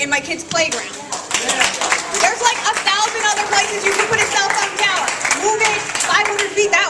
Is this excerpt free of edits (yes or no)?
yes